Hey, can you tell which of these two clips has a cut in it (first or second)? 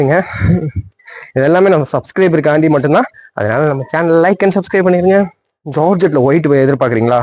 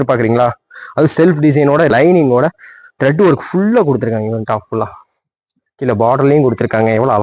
second